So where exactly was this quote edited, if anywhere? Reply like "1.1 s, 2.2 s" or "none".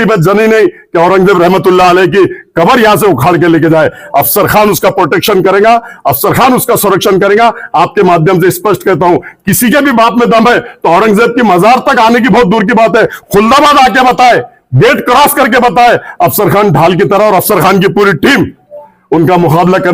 none